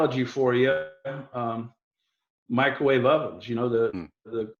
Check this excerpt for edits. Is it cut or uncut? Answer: uncut